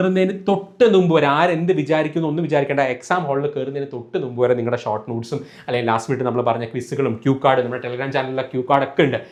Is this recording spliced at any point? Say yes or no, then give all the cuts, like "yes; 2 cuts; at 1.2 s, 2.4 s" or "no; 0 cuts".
no; 0 cuts